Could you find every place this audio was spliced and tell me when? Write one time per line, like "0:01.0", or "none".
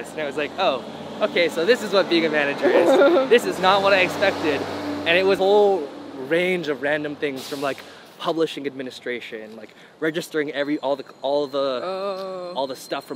none